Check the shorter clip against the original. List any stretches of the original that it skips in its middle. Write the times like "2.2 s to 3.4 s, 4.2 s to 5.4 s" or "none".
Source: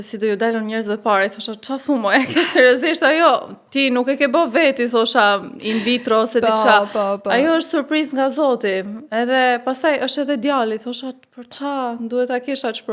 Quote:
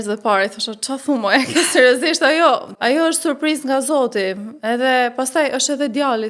3.6 s to 7.2 s